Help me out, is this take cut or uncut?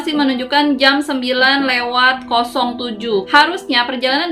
cut